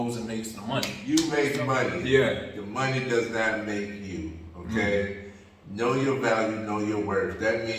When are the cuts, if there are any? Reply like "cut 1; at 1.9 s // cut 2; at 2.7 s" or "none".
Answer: cut 1; at 1.0 s